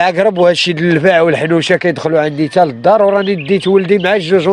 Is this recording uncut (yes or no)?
yes